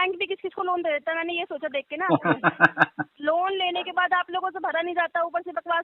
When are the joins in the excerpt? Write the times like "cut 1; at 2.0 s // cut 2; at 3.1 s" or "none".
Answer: cut 1; at 3.1 s